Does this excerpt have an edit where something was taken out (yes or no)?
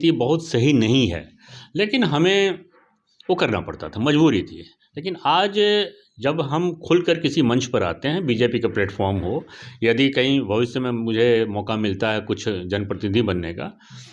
no